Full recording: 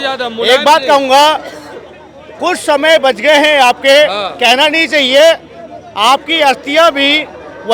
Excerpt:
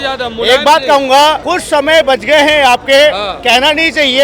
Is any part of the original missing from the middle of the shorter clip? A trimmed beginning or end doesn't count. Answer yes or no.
yes